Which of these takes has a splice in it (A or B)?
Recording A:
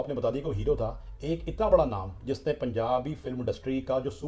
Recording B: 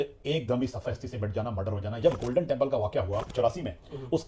B